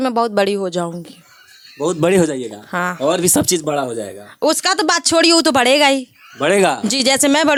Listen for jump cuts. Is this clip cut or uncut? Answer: uncut